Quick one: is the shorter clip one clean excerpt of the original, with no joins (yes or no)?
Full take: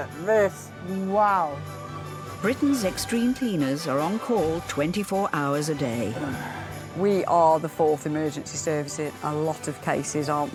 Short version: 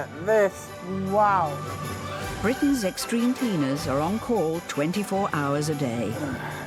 yes